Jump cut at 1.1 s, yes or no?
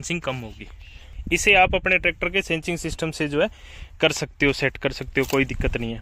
no